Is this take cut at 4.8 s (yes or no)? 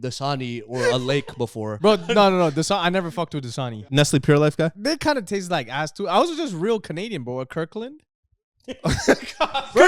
yes